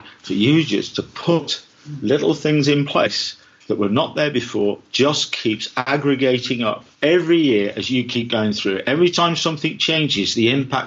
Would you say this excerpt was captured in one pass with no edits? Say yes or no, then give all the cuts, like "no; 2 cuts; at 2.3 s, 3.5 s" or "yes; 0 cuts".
no; 2 cuts; at 5.7 s, 6.9 s